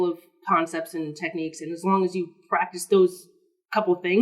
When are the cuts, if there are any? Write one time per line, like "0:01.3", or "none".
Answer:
none